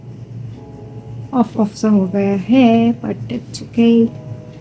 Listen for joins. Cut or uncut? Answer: uncut